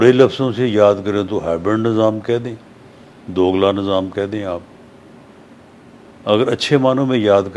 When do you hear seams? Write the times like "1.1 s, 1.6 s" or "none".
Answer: none